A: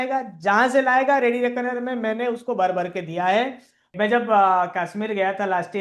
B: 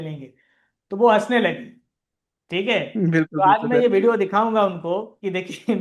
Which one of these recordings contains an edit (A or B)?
A